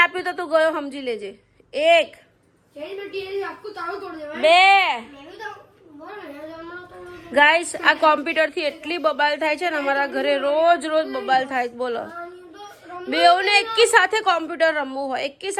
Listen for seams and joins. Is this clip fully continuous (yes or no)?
yes